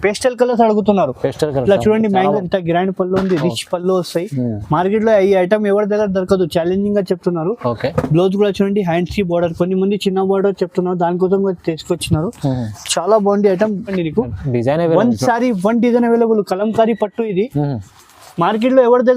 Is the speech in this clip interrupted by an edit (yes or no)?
yes